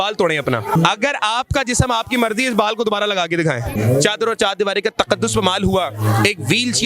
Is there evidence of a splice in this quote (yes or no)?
yes